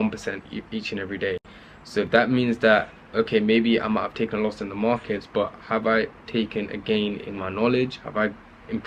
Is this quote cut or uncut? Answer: uncut